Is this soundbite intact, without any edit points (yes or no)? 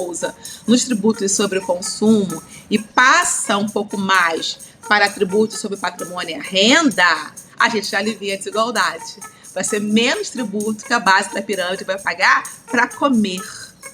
no